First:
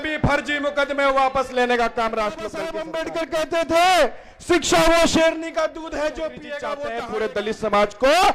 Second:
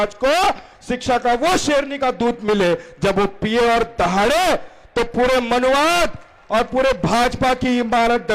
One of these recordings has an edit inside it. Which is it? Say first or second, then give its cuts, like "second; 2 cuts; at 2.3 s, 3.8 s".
first; 2 cuts; at 2.8 s, 6.9 s